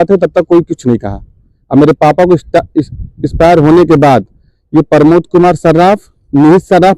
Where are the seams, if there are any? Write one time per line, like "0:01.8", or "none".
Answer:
none